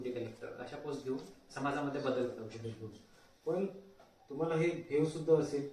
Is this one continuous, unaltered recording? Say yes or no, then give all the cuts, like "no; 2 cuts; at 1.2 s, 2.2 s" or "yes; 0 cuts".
yes; 0 cuts